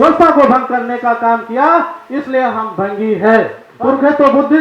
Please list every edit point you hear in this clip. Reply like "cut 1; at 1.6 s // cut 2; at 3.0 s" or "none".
cut 1; at 3.6 s